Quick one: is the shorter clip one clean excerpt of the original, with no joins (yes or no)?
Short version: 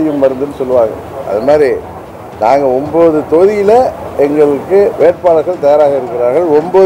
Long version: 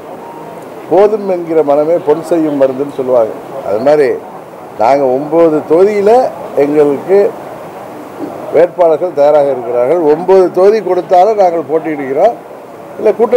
no